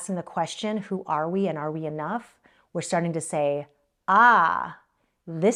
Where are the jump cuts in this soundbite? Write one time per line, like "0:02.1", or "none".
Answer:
none